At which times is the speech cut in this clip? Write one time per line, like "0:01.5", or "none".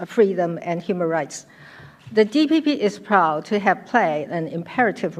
0:03.2

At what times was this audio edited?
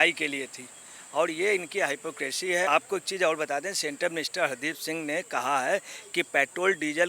0:02.7

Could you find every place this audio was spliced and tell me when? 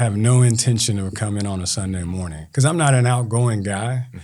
0:02.4

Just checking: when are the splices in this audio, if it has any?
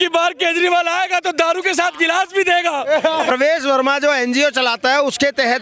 0:03.3

